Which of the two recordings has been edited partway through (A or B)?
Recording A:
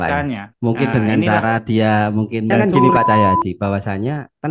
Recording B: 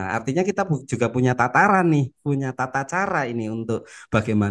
A